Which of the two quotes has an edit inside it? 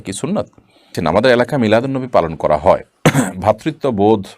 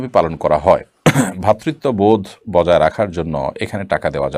first; 1 cut; at 0.9 s

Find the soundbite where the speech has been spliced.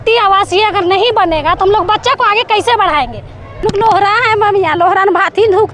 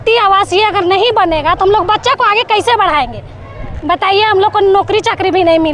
first; 1 cut; at 3.5 s

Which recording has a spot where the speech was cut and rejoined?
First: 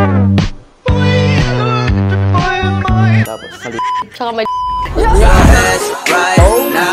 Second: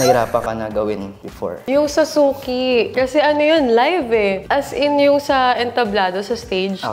second; 3 cuts; at 1.5 s, 2.9 s, 4.4 s

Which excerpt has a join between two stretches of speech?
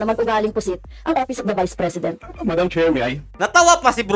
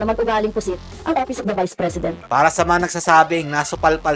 second; 1 cut; at 2.2 s

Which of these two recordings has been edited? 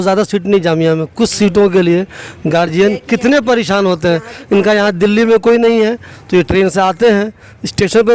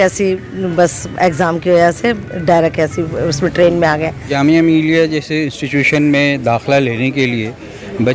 second; 1 cut; at 4.3 s

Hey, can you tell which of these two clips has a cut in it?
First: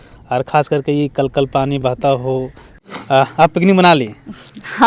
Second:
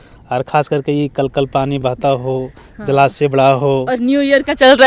first; 1 cut; at 2.7 s

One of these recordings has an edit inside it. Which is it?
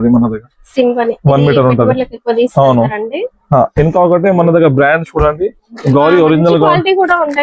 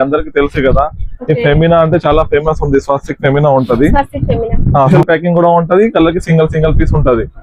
second; 1 cut; at 4.9 s

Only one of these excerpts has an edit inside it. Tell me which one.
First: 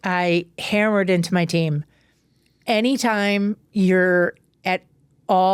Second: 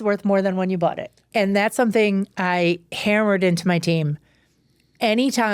second; 1 cut; at 1.3 s

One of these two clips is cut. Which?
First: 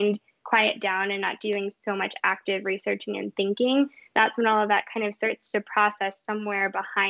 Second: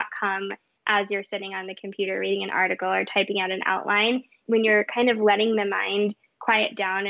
second; 1 cut; at 4.4 s

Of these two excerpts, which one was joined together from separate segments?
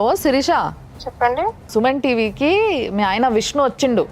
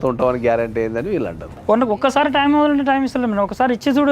second; 1 cut; at 1.6 s

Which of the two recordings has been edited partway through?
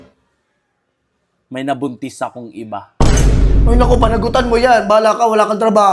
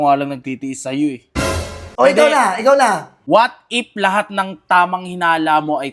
second; 2 cuts; at 1.8 s, 3.1 s

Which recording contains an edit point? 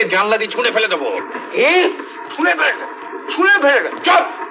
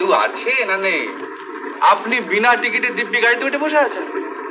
second; 1 cut; at 1.6 s

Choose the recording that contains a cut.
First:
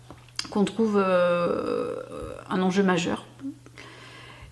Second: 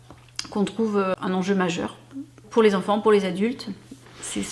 second; 2 cuts; at 1.1 s, 2.4 s

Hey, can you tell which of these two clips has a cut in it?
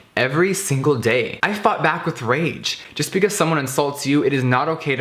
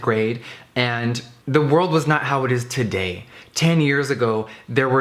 first; 2 cuts; at 1.4 s, 2.8 s

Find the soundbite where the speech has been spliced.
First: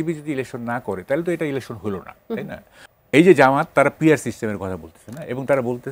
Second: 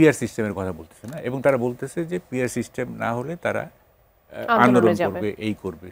first; 1 cut; at 2.8 s

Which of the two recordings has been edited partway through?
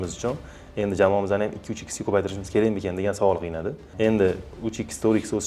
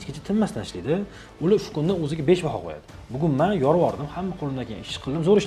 first; 1 cut; at 3.8 s

